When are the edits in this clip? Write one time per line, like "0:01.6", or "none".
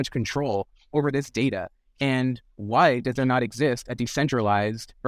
none